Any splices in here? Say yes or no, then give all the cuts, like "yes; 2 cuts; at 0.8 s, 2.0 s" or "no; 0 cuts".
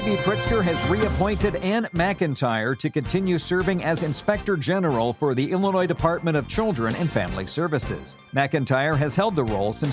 no; 0 cuts